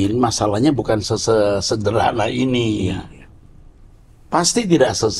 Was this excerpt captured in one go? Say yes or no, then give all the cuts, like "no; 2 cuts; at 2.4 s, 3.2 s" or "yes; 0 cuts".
yes; 0 cuts